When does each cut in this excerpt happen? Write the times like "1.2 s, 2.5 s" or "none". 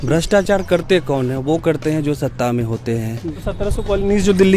3.4 s